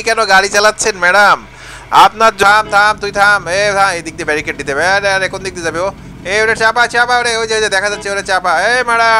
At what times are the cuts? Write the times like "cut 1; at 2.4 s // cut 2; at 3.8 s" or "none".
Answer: cut 1; at 2.4 s